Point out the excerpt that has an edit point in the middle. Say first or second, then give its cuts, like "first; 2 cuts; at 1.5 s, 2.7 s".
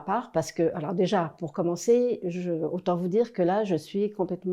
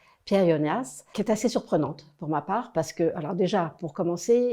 second; 1 cut; at 1.0 s